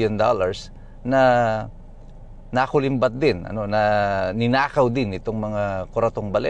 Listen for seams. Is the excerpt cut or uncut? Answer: uncut